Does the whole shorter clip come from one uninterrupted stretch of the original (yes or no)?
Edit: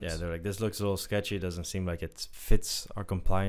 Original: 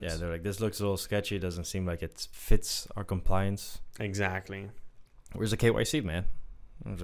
yes